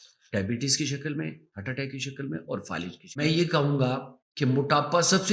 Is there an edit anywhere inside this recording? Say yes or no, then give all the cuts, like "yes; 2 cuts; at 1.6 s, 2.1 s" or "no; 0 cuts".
yes; 1 cut; at 3.2 s